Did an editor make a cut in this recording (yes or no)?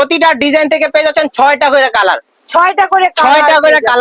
no